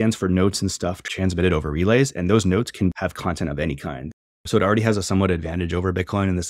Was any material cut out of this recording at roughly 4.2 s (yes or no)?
yes